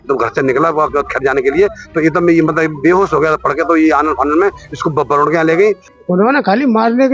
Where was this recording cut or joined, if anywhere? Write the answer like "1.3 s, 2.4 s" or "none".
5.9 s

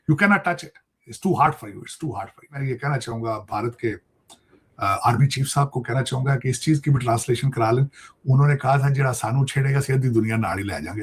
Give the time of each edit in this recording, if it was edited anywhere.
2.7 s

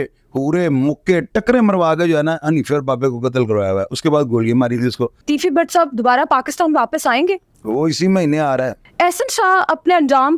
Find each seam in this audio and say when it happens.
5.2 s, 8.8 s

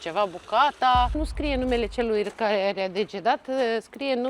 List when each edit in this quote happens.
1.2 s

